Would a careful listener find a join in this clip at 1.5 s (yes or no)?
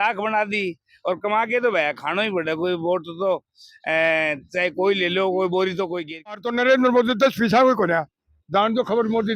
no